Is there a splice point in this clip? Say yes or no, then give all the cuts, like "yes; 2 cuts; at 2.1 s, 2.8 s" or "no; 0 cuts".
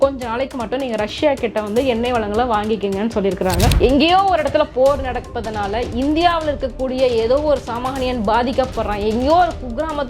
yes; 1 cut; at 3.7 s